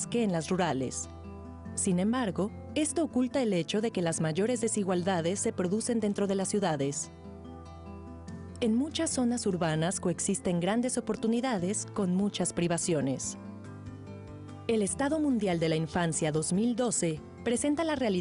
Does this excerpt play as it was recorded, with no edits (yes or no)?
no